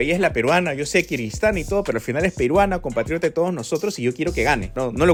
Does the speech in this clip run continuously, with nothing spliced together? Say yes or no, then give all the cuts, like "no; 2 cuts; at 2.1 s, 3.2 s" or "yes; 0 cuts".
yes; 0 cuts